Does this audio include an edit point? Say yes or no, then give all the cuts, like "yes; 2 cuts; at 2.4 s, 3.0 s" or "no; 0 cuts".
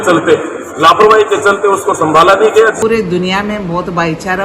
yes; 1 cut; at 2.8 s